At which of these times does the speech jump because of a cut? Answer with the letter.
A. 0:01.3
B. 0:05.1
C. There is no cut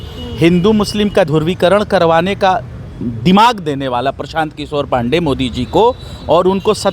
A